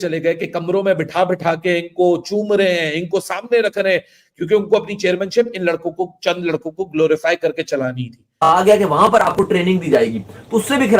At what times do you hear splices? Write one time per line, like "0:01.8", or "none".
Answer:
0:08.4